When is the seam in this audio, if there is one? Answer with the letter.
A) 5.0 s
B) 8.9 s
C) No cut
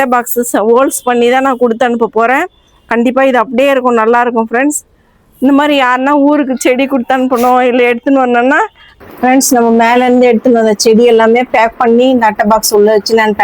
B